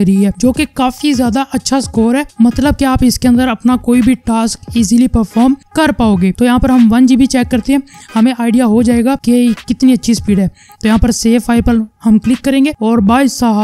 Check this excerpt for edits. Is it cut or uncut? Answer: cut